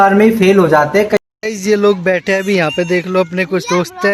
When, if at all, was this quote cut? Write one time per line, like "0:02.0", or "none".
0:01.1

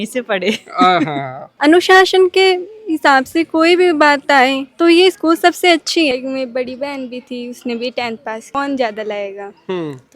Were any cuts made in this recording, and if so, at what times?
0:01.6
0:06.1
0:08.5

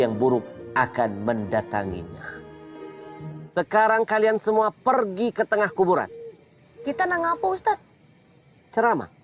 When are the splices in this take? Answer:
0:03.4

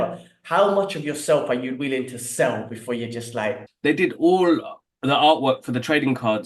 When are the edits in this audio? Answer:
0:03.7

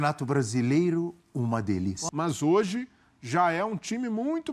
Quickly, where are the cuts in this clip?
0:02.0

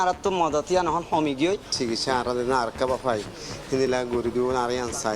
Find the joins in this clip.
0:01.7

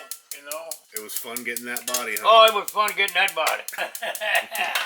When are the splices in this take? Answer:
0:00.9
0:03.8

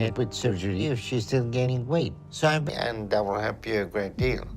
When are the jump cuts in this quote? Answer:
0:02.7

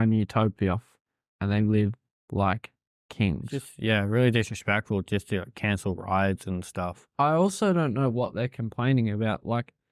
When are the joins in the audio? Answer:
0:03.6

